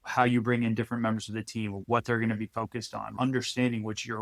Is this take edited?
yes; 1 cut; at 3.1 s

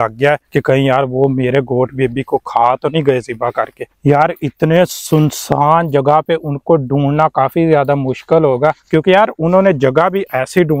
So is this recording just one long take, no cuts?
no; 1 cut; at 3.9 s

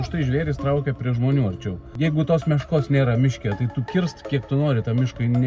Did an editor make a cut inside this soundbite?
yes; 1 cut; at 2.0 s

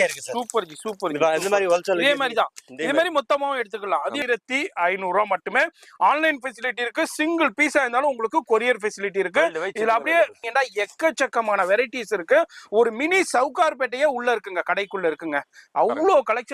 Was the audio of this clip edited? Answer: yes; 2 cuts; at 4.2 s, 10.4 s

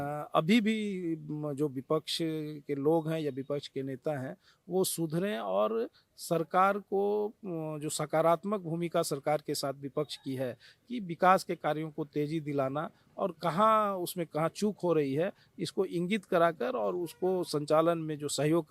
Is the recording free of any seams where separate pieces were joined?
yes; 0 cuts

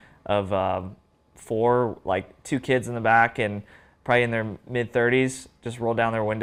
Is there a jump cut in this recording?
no; 0 cuts

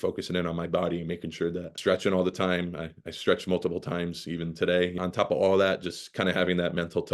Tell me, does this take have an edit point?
yes; 2 cuts; at 1.7 s, 5.0 s

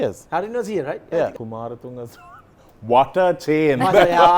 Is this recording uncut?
no; 1 cut; at 1.3 s

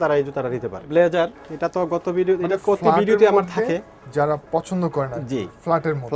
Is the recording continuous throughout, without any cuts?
yes; 0 cuts

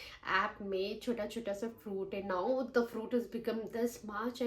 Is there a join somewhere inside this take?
no; 0 cuts

